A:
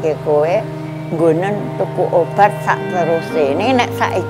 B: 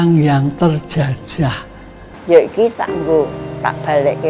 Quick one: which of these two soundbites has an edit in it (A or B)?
B